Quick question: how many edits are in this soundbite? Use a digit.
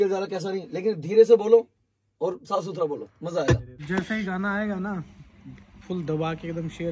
1